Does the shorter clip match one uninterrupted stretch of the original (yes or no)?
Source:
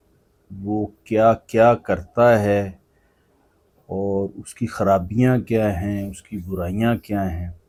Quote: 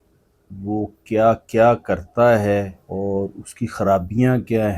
no